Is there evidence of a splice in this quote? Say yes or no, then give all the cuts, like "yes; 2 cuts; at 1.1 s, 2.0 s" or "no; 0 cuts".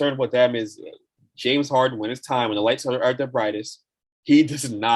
no; 0 cuts